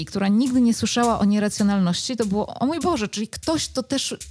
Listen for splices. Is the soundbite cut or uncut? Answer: uncut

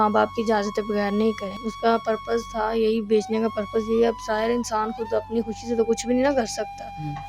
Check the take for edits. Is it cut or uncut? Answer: cut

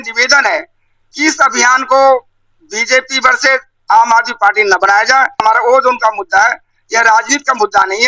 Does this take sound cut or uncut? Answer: cut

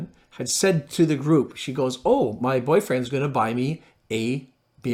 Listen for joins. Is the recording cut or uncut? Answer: uncut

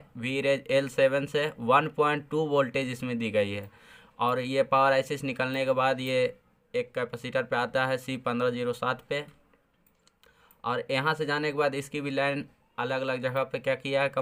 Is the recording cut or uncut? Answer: uncut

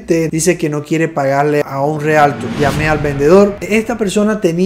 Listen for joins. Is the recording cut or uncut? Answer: cut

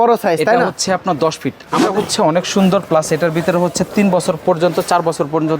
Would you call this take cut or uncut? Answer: cut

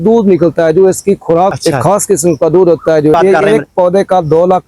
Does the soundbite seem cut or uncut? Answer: cut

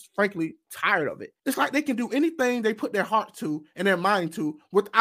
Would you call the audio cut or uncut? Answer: cut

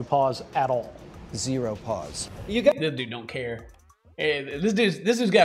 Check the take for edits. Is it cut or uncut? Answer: uncut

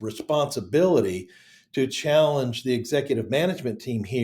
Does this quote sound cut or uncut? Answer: uncut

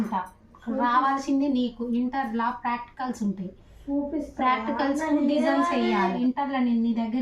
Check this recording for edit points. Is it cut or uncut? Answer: cut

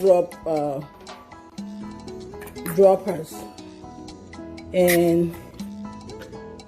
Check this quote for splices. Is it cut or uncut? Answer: cut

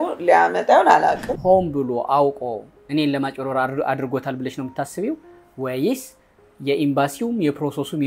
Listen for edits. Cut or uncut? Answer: cut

